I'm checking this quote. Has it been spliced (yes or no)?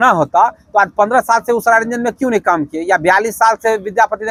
no